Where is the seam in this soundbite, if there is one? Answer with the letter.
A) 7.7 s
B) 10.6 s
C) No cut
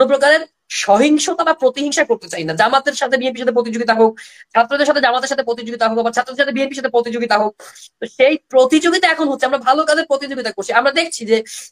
C